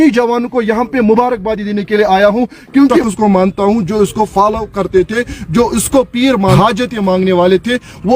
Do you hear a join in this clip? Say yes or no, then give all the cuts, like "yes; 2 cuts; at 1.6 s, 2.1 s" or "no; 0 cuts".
yes; 2 cuts; at 3.1 s, 6.6 s